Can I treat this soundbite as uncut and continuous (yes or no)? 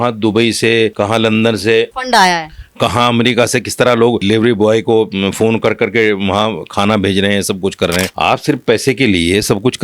no